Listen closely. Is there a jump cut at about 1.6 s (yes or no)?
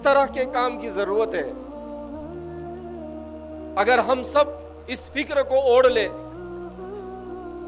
yes